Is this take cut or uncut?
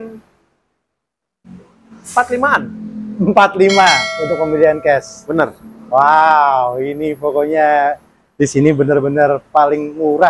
uncut